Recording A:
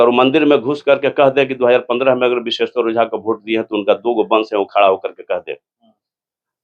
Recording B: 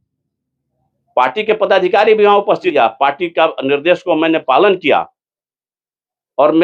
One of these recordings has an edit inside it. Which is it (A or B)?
B